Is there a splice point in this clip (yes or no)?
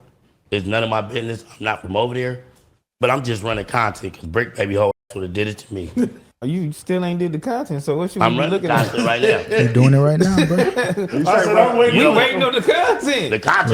yes